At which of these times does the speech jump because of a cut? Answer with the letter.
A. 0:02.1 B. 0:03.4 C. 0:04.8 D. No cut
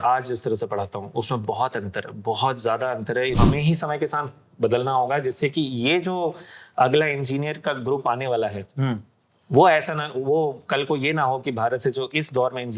B